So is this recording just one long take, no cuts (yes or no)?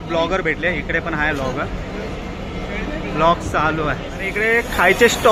yes